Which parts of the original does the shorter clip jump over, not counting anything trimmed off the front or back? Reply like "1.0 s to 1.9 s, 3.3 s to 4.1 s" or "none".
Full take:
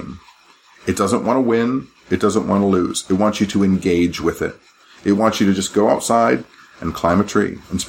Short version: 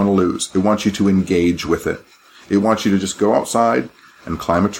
none